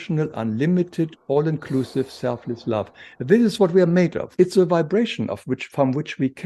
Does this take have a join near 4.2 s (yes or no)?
yes